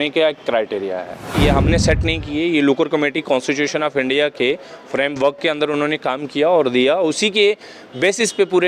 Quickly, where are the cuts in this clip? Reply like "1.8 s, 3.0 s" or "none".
1.3 s